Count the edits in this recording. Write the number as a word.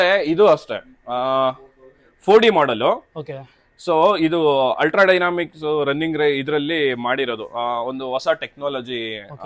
zero